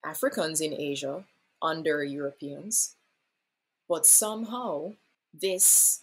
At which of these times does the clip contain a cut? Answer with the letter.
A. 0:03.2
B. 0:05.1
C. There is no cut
B